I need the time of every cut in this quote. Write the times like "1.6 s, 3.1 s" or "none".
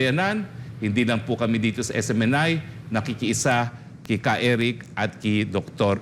none